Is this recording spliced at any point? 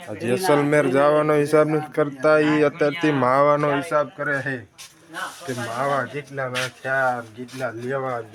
no; 0 cuts

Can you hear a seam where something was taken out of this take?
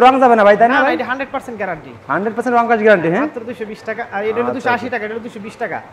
no; 0 cuts

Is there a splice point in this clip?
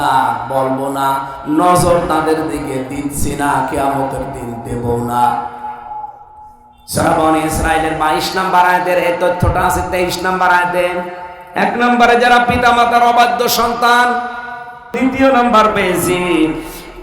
yes; 1 cut; at 14.9 s

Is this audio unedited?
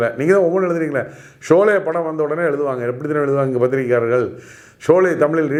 yes; 0 cuts

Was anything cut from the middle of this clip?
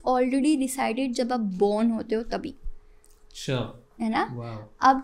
no; 0 cuts

